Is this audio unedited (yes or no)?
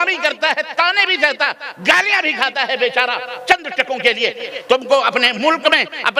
no